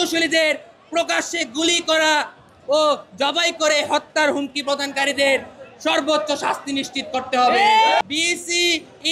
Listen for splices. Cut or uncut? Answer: cut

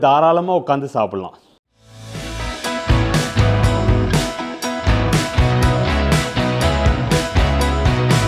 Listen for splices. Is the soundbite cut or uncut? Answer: uncut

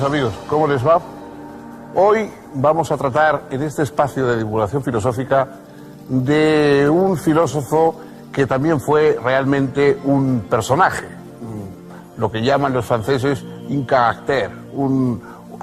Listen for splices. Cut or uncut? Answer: cut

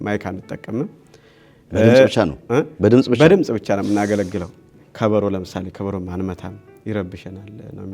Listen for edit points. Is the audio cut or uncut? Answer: cut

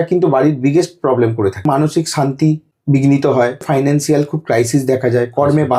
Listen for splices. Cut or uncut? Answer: cut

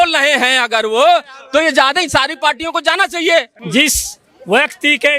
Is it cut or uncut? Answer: cut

